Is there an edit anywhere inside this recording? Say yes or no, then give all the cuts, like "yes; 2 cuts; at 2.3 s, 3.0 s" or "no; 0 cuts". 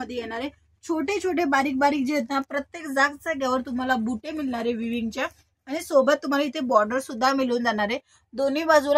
no; 0 cuts